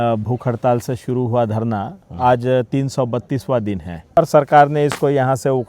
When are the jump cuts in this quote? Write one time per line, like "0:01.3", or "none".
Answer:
0:04.2